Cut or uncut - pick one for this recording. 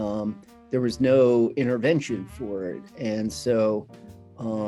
uncut